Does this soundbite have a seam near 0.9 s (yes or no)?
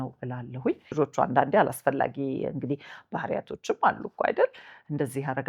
yes